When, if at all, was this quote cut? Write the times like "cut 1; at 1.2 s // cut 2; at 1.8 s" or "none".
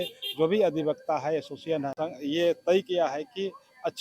cut 1; at 2.0 s